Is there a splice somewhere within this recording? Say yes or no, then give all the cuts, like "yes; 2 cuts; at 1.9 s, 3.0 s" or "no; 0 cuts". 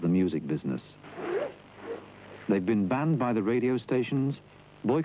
yes; 1 cut; at 3.3 s